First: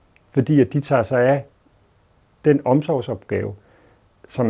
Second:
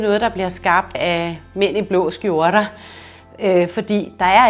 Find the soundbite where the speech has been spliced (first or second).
second